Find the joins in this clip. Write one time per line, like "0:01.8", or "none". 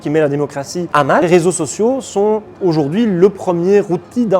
0:01.1